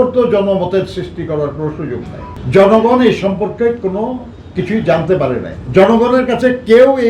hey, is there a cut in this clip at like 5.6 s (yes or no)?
yes